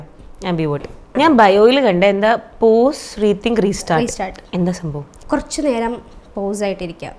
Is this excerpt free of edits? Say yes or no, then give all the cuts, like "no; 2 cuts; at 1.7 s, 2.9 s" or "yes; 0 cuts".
no; 2 cuts; at 1.1 s, 5.1 s